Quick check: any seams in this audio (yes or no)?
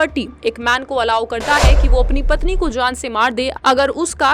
no